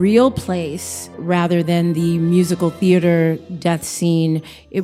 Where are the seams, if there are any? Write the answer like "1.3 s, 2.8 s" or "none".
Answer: 1.2 s